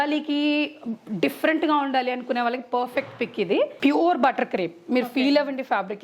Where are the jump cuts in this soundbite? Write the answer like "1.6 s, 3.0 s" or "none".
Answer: 3.7 s